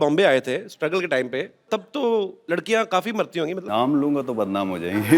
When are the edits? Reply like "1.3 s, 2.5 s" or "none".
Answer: 1.7 s, 2.4 s, 3.6 s